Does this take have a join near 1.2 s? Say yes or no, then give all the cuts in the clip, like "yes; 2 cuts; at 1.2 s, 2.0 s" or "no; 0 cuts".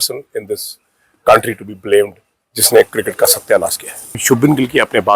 no; 1 cut; at 4.2 s